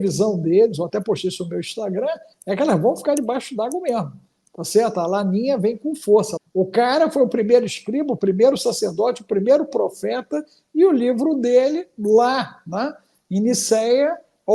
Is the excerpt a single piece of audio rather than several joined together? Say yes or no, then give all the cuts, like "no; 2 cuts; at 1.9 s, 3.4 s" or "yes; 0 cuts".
no; 1 cut; at 6.4 s